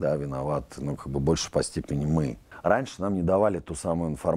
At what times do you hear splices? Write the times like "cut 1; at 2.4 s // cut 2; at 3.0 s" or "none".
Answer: cut 1; at 2.4 s